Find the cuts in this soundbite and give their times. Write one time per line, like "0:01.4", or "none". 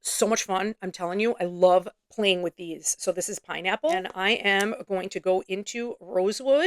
0:04.1